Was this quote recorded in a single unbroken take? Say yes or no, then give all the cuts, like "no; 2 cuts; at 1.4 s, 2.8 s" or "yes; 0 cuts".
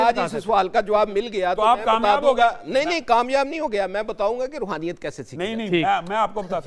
yes; 0 cuts